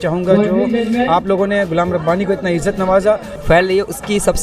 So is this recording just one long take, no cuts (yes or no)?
no